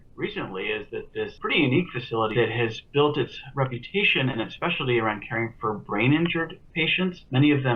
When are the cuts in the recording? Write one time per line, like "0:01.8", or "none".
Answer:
0:01.3
0:02.3